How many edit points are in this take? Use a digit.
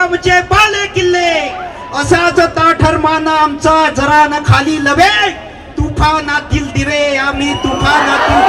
0